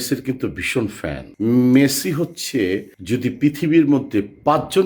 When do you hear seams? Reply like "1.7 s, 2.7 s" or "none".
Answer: 1.2 s